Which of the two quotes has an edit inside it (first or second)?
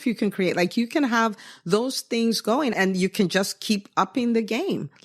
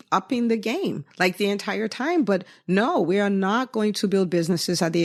first